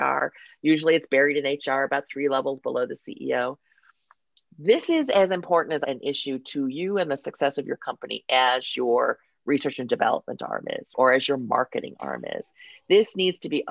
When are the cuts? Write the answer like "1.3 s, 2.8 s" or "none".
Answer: 5.8 s, 10.9 s

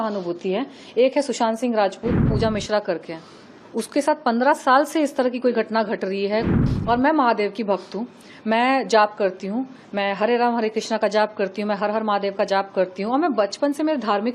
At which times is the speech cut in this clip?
2.3 s, 6.5 s

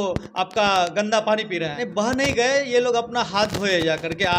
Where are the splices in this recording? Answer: 1.8 s

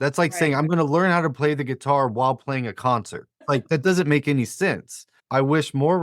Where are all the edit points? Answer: 3.3 s, 5.2 s

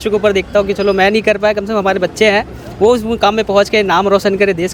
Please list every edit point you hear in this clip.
none

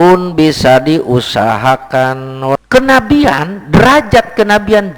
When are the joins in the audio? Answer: 2.6 s

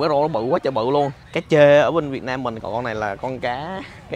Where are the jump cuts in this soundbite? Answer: 1.3 s, 2.6 s

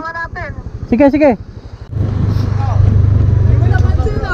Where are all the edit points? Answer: 2.1 s

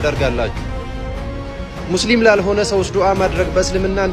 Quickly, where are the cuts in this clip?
none

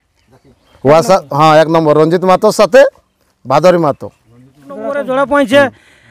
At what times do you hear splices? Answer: 4.9 s

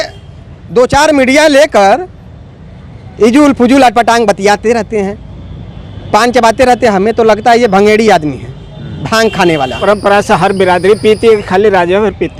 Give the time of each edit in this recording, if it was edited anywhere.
9.8 s

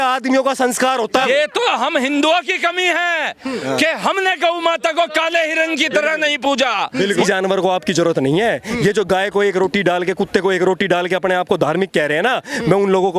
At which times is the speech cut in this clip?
1.2 s, 7.1 s

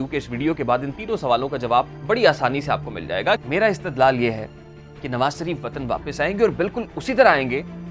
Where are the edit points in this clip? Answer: 3.4 s

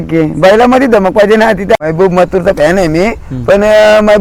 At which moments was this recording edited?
1.8 s

